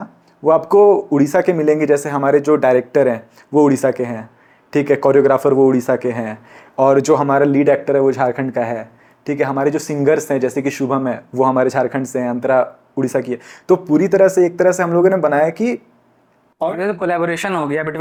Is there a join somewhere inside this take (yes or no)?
no